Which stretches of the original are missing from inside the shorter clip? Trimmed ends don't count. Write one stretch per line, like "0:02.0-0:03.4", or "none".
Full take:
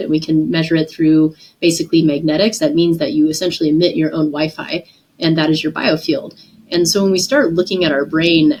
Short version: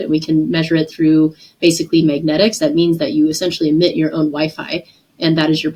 none

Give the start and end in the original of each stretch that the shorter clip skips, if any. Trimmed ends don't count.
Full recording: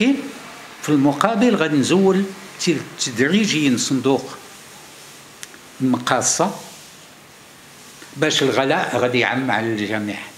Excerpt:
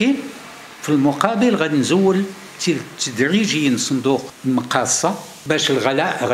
0:04.3-0:05.7
0:06.7-0:08.0

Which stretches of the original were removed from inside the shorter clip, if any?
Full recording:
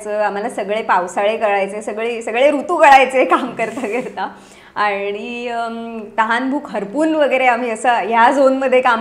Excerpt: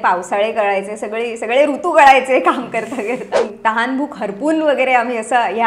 0:04.3-0:06.0

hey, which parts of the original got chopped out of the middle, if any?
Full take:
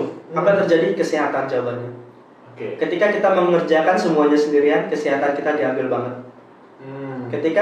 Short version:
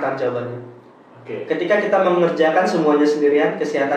none

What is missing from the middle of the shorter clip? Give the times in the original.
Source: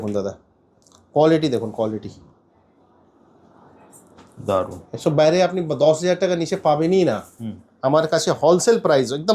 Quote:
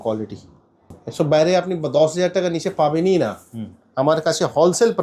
0:02.7-0:04.8

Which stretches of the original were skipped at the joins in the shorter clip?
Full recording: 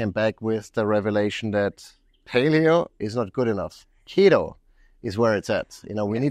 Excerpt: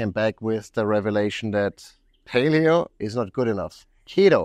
none

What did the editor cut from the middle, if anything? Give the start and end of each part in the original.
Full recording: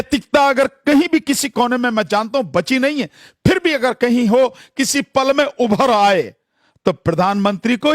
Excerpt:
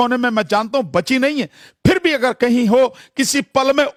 none

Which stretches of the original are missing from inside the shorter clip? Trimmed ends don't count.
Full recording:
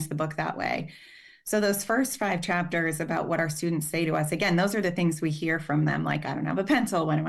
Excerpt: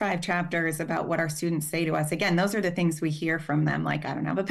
none

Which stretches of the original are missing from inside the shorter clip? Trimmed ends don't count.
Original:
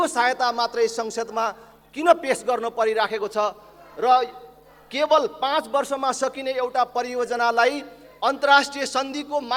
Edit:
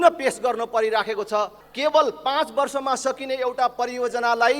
0:03.7-0:04.8

